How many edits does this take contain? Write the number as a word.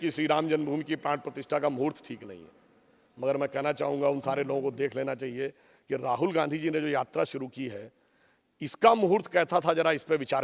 zero